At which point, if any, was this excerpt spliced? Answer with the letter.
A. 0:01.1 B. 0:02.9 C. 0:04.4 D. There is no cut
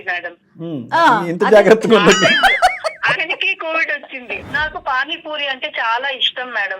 C